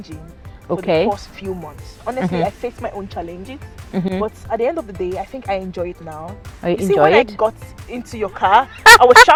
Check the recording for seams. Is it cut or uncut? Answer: uncut